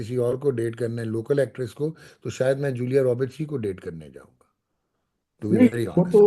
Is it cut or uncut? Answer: uncut